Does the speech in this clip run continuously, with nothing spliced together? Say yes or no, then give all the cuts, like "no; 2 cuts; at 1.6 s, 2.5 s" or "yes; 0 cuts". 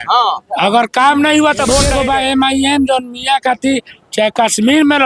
no; 1 cut; at 1.9 s